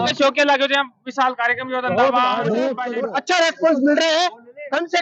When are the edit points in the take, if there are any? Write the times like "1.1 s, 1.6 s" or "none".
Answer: 2.9 s